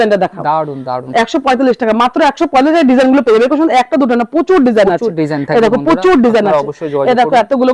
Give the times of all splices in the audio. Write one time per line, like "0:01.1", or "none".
none

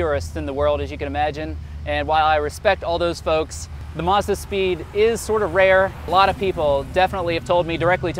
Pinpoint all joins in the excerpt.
0:03.8
0:06.1

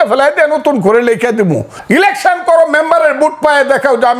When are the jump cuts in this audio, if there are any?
0:01.7

